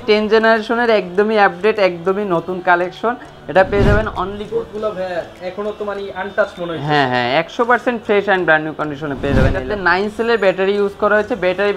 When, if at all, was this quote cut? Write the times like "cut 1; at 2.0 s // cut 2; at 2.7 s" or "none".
cut 1; at 4.4 s // cut 2; at 9.7 s